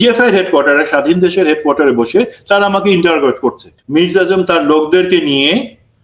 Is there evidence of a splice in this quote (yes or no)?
yes